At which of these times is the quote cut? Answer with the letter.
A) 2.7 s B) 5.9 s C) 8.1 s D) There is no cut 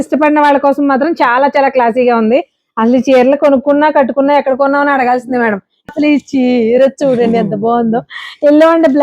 B